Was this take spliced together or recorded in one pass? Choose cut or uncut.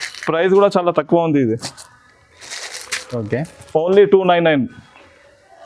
uncut